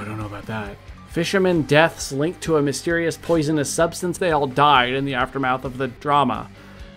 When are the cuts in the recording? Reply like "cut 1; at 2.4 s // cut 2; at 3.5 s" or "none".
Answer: cut 1; at 0.9 s // cut 2; at 4.1 s // cut 3; at 6.0 s